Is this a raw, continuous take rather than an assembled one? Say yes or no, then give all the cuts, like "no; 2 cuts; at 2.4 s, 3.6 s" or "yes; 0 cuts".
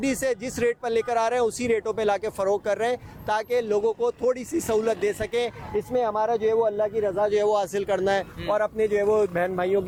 yes; 0 cuts